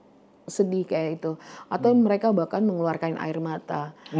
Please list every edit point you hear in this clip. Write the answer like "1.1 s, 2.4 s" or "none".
none